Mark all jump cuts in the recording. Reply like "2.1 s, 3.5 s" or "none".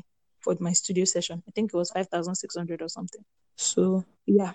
none